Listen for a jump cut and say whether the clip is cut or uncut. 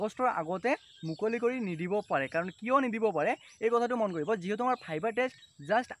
uncut